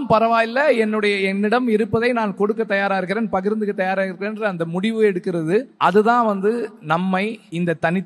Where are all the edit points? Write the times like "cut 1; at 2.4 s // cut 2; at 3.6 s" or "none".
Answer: cut 1; at 5.7 s // cut 2; at 7.2 s